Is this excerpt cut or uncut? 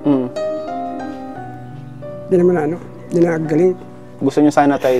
cut